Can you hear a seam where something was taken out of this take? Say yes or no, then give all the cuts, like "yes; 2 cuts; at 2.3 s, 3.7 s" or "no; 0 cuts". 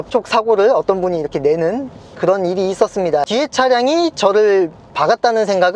yes; 1 cut; at 3.3 s